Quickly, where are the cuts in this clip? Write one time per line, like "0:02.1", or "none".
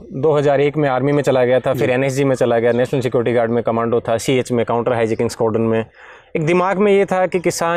none